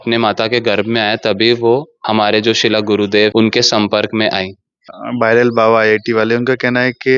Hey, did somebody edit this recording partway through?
yes; 3 cuts; at 1.9 s, 3.3 s, 5.0 s

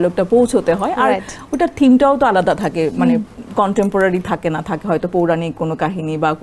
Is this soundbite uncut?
yes; 0 cuts

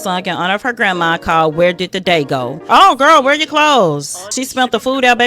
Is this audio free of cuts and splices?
no; 2 cuts; at 2.6 s, 4.3 s

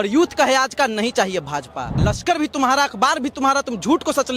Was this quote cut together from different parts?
yes; 1 cut; at 2.0 s

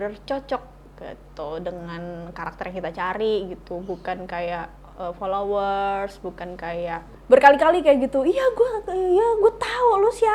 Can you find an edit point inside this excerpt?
yes; 1 cut; at 7.1 s

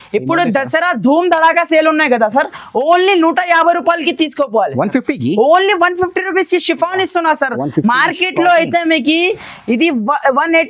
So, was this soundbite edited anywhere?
no; 0 cuts

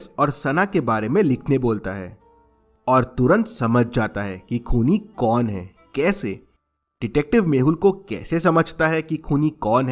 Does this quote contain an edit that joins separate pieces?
yes; 1 cut; at 7.2 s

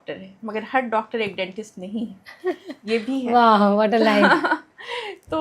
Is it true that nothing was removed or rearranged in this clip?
yes; 0 cuts

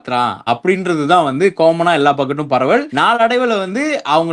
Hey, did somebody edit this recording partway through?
no; 0 cuts

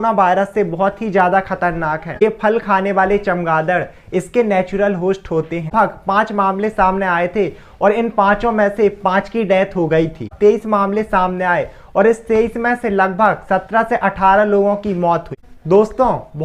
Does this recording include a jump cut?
yes; 4 cuts; at 2.2 s, 5.7 s, 10.3 s, 15.4 s

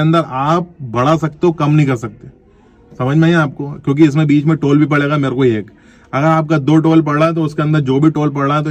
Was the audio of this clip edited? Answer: no; 0 cuts

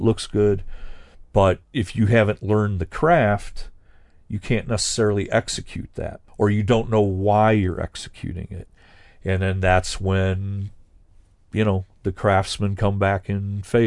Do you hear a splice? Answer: yes; 2 cuts; at 1.7 s, 6.3 s

